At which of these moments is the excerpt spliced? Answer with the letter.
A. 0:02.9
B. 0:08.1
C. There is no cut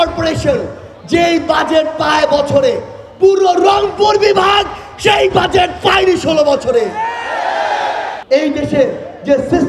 B